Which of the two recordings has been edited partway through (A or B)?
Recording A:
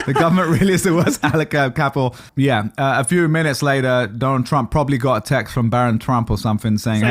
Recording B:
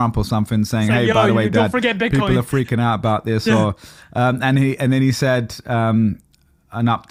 A